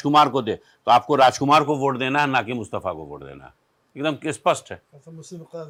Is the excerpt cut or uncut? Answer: uncut